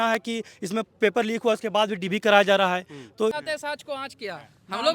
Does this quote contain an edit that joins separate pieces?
yes; 1 cut; at 3.3 s

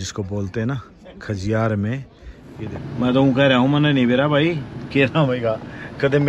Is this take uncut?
no; 1 cut; at 2.7 s

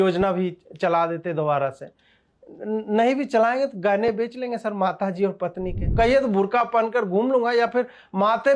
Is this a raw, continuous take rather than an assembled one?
no; 1 cut; at 5.8 s

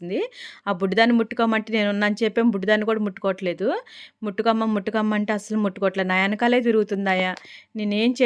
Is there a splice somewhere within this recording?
no; 0 cuts

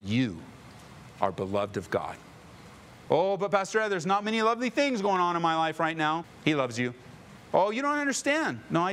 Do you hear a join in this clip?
no; 0 cuts

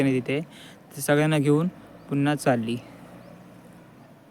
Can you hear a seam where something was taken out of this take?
no; 0 cuts

